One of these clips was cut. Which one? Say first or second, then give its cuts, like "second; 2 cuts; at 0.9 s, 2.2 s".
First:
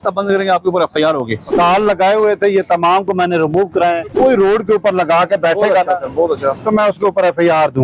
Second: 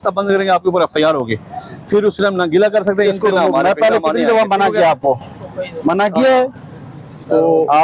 first; 2 cuts; at 1.5 s, 4.1 s